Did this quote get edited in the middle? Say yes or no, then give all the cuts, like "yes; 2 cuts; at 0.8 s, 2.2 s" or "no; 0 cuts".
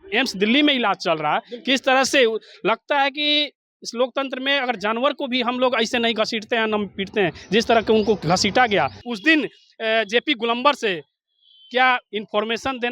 yes; 1 cut; at 9.1 s